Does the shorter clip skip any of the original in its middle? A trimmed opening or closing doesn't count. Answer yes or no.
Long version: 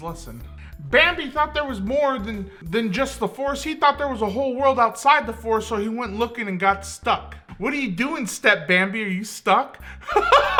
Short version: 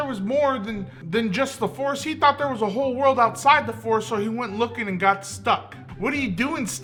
no